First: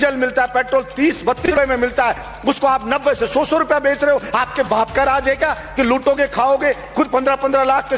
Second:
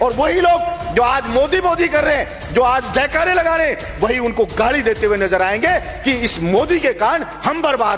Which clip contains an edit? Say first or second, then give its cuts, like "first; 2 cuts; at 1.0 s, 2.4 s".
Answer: first; 1 cut; at 1.4 s